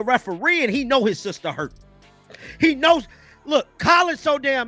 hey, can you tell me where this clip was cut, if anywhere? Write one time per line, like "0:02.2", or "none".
none